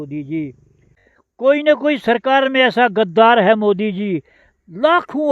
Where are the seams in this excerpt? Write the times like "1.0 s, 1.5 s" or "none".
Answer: 1.0 s